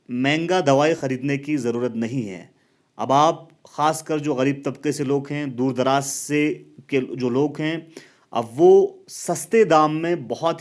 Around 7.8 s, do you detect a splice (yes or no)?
no